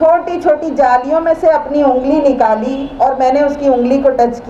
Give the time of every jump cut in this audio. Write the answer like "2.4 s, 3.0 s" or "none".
none